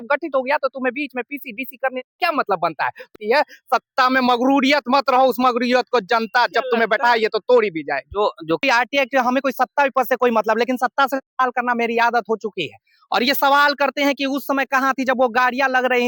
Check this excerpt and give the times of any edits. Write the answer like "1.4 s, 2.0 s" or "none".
3.1 s, 8.6 s